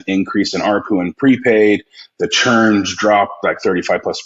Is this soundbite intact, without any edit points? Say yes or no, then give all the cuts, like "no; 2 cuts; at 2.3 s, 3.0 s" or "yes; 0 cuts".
yes; 0 cuts